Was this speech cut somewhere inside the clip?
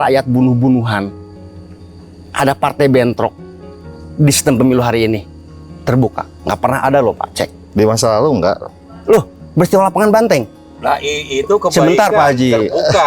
no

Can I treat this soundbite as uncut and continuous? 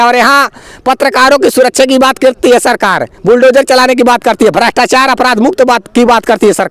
yes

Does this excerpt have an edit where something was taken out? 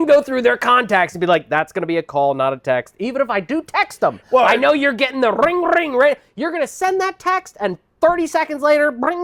no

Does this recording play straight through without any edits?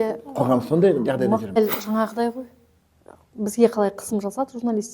no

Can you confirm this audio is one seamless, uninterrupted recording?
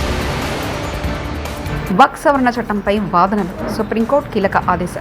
no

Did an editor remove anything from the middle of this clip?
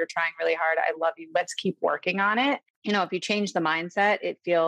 no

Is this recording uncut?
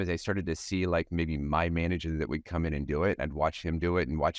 yes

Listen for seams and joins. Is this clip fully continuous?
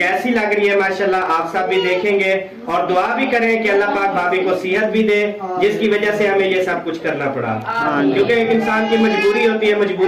yes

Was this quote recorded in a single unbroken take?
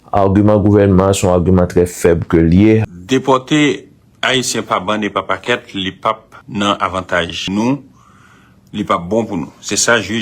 no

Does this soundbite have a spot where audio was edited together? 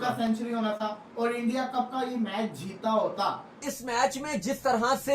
yes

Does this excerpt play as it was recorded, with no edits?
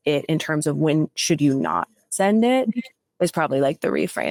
yes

